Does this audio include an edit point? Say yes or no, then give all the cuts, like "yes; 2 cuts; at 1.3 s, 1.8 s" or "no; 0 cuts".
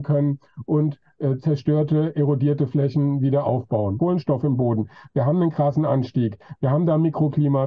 yes; 1 cut; at 4.0 s